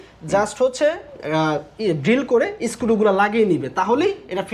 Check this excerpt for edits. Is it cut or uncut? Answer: uncut